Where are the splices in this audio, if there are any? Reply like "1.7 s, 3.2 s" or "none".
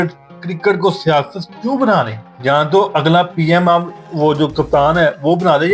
2.2 s, 4.0 s